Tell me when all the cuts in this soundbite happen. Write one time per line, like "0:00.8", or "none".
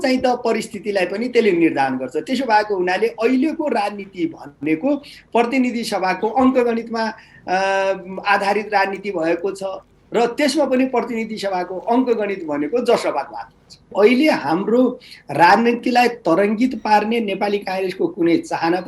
0:13.9